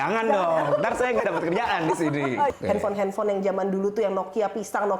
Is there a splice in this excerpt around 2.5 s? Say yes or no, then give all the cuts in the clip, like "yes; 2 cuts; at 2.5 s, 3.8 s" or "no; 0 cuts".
yes; 1 cut; at 2.5 s